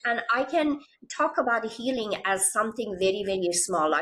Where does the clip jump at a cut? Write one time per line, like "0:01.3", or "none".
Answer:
none

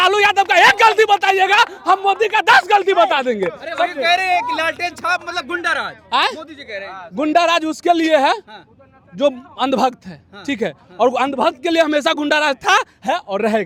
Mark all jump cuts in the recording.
none

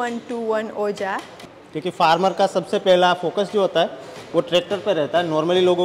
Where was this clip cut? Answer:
0:01.4

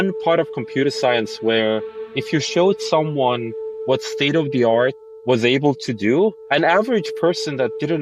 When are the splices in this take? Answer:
0:06.4

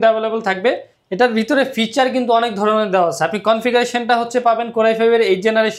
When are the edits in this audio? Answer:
0:00.9

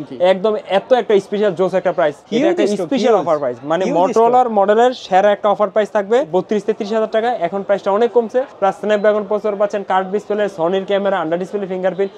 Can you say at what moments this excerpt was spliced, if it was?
0:02.2
0:06.3
0:08.5

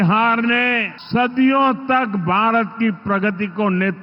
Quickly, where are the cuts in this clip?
0:00.9

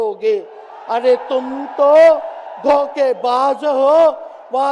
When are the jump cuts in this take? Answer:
none

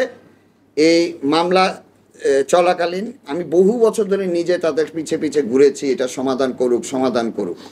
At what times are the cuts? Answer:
none

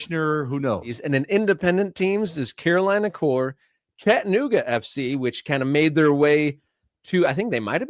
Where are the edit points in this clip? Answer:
0:01.0

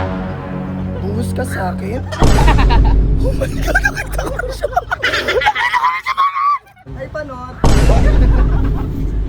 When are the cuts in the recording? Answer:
0:06.9

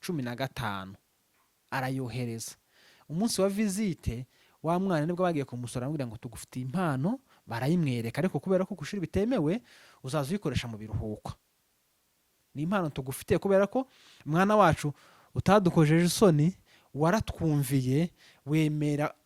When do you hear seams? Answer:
none

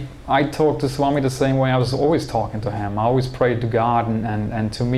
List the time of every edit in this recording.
none

